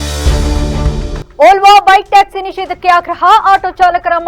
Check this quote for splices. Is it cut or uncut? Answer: cut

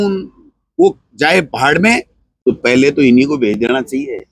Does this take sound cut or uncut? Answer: cut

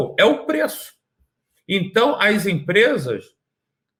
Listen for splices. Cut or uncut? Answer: uncut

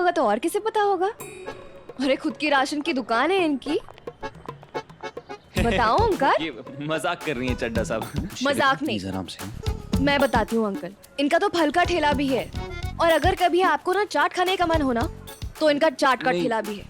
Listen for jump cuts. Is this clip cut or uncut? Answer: cut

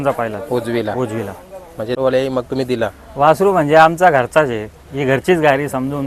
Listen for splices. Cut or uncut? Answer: cut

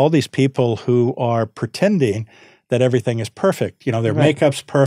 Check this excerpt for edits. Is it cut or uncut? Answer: uncut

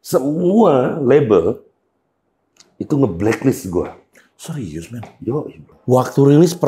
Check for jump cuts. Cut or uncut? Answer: cut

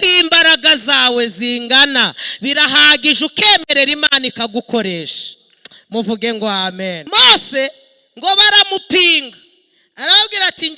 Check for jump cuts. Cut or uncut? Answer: cut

